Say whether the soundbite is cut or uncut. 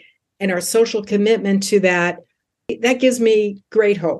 cut